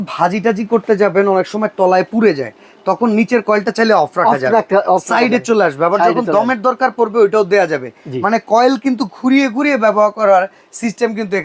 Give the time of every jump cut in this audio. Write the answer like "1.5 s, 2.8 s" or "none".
none